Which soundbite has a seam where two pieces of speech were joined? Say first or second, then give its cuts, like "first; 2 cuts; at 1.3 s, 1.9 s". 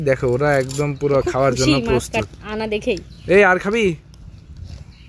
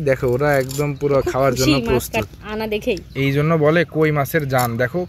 second; 1 cut; at 3.1 s